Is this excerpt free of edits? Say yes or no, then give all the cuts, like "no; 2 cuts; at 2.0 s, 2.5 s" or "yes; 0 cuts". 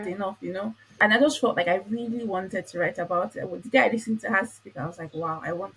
yes; 0 cuts